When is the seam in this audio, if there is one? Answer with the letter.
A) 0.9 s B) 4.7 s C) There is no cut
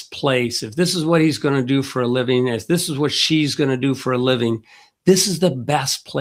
C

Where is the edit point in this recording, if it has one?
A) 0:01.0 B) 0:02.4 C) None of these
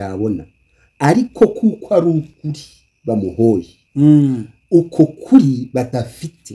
C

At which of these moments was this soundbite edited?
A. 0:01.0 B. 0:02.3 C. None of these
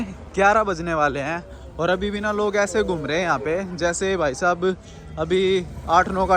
C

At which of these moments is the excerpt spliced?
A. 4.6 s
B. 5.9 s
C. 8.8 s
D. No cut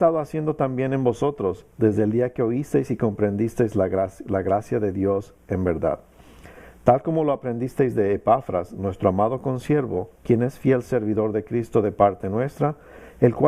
B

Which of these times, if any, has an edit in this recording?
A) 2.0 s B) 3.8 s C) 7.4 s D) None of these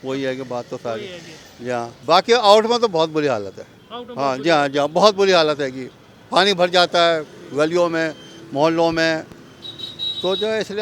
A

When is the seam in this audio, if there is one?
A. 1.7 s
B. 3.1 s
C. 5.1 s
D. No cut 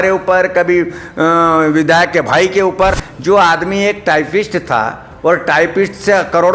B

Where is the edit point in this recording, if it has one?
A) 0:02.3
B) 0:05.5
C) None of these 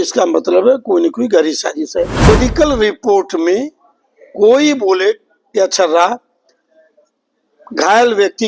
A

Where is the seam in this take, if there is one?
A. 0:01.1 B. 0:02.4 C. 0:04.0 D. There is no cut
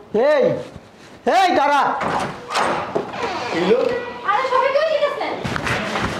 D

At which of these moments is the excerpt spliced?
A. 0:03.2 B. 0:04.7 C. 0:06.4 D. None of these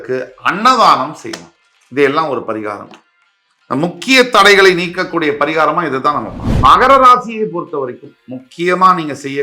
C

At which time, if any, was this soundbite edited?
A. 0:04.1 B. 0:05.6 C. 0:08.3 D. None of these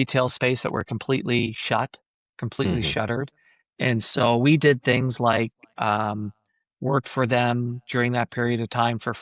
D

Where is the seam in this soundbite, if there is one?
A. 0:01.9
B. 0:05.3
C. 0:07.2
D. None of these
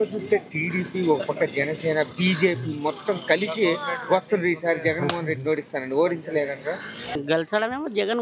C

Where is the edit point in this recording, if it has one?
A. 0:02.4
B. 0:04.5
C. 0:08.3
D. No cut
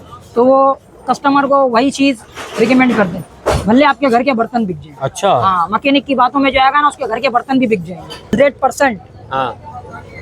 C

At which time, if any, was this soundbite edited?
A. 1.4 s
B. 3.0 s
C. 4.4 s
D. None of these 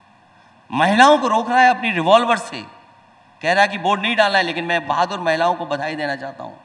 D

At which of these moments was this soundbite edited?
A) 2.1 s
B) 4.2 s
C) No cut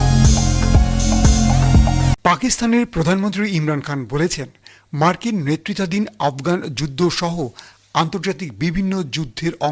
A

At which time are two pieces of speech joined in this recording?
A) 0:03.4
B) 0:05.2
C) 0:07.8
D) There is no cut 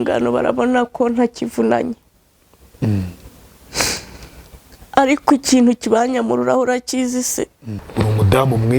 C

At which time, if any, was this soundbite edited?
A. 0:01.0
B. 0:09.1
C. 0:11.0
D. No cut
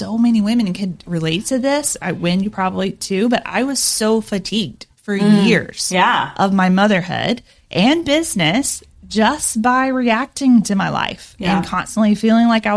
A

